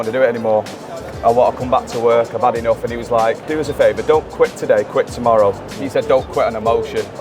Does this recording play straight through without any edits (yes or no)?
no